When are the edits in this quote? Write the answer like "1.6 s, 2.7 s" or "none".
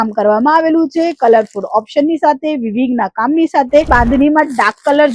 3.9 s